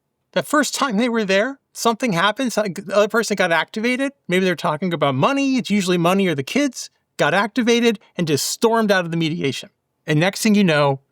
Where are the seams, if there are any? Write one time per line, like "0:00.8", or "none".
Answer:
0:01.6